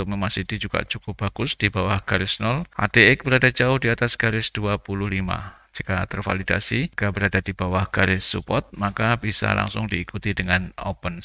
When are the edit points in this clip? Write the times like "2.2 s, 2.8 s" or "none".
2.7 s, 6.9 s